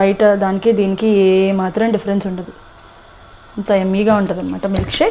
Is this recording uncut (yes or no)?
yes